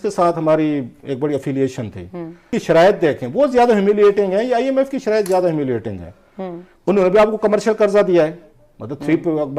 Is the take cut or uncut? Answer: cut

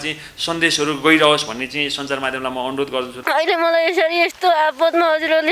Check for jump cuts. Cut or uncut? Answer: cut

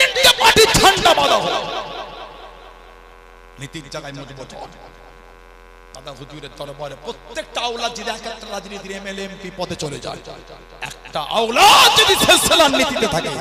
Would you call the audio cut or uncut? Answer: uncut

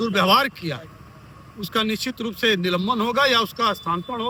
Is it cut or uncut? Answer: uncut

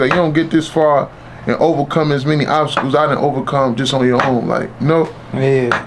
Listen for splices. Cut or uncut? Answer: uncut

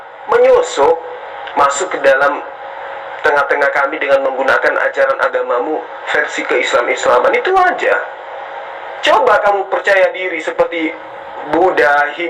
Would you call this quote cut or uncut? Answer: uncut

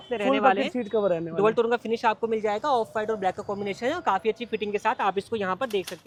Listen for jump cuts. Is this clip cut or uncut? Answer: uncut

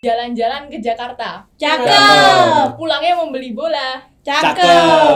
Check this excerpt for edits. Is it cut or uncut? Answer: uncut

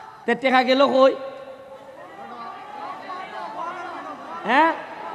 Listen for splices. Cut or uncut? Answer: uncut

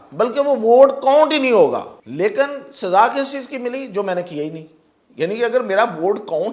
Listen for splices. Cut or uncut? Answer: cut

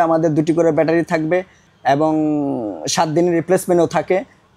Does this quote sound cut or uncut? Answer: uncut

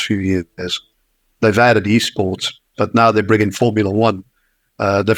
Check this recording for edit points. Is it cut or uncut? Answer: uncut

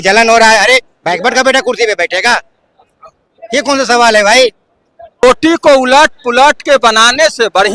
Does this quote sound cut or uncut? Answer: cut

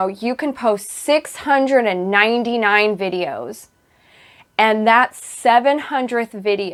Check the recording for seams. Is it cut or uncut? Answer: uncut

